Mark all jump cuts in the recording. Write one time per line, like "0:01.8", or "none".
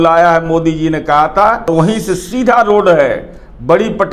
0:01.7